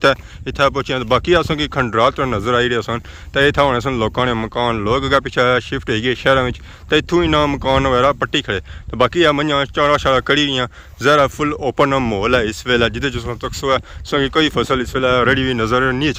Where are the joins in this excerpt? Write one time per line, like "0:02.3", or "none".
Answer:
none